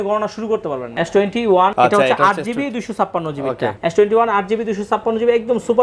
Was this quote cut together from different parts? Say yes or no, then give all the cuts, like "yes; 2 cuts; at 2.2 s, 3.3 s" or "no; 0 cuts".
yes; 3 cuts; at 0.8 s, 1.7 s, 3.8 s